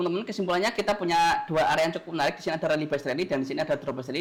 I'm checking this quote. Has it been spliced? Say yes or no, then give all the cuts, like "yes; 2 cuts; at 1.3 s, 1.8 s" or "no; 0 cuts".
no; 0 cuts